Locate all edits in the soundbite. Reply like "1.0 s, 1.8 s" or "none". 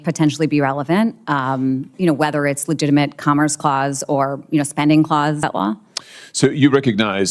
5.4 s